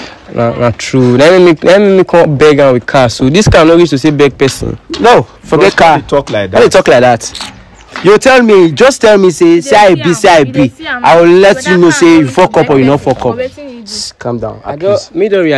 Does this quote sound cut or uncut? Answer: uncut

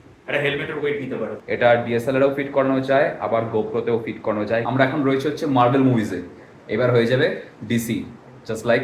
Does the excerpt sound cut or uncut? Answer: cut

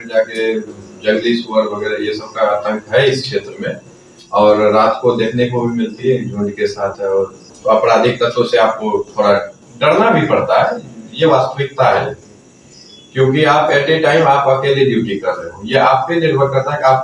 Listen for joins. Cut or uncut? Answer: cut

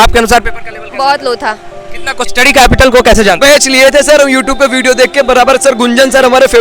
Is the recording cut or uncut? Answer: cut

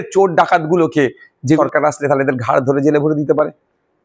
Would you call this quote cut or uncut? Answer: cut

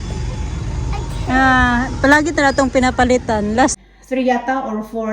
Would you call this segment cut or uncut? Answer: cut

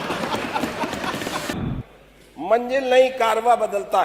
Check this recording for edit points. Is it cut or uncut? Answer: cut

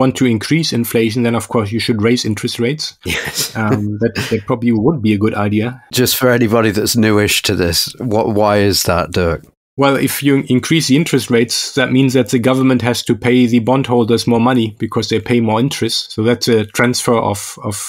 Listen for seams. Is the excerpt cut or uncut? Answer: uncut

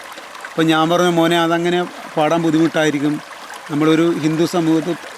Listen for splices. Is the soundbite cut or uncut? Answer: uncut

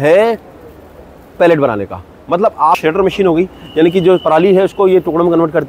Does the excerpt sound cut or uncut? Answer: cut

